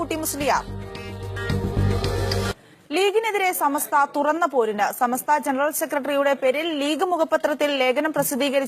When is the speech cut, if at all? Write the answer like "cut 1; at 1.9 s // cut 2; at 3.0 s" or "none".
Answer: cut 1; at 1.9 s